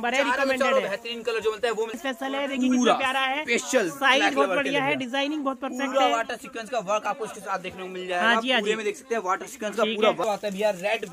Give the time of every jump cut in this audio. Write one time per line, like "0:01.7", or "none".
0:01.9
0:10.2